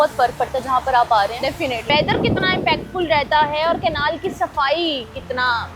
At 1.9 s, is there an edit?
yes; 1 cut; at 1.9 s

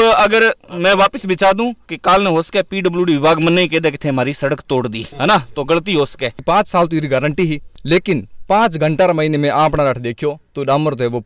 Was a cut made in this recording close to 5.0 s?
yes; 2 cuts; at 5.0 s, 6.4 s

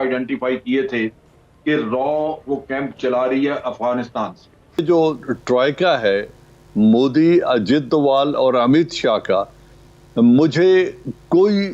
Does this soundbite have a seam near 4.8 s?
yes; 1 cut; at 4.8 s

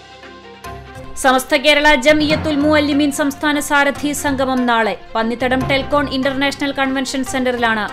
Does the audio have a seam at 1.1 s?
yes; 1 cut; at 1.1 s

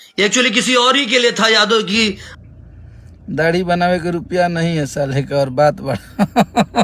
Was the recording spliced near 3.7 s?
no; 1 cut; at 2.3 s

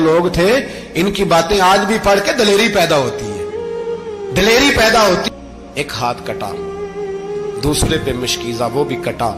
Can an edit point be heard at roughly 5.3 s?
yes; 1 cut; at 5.3 s

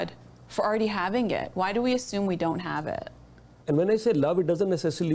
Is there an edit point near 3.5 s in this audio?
yes; 1 cut; at 3.5 s

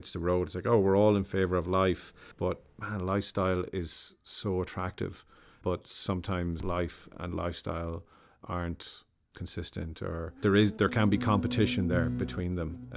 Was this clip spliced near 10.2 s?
no; 2 cuts; at 2.3 s, 6.6 s

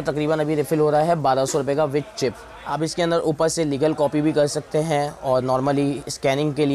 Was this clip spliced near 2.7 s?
yes; 1 cut; at 2.7 s

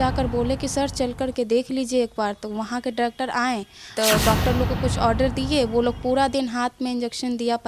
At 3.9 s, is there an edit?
yes; 1 cut; at 3.9 s

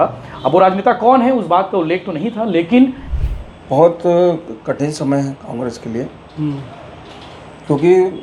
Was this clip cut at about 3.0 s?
yes; 1 cut; at 3.0 s

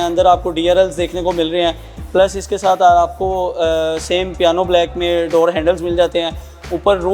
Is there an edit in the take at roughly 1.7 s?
no; 0 cuts

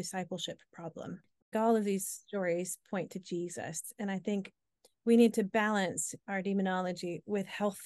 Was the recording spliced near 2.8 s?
no; 1 cut; at 1.3 s

